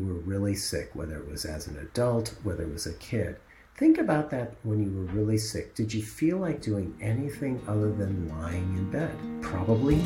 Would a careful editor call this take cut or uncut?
uncut